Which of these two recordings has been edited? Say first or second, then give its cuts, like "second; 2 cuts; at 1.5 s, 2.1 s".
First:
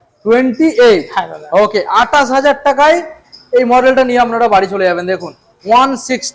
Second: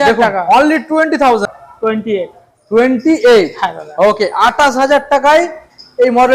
second; 1 cut; at 1.5 s